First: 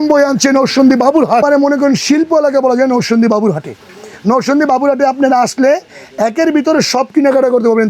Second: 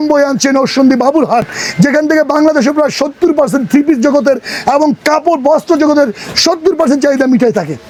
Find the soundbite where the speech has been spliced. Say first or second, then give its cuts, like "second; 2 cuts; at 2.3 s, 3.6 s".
first; 1 cut; at 1.4 s